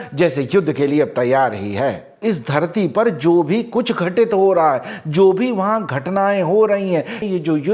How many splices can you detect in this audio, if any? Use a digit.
1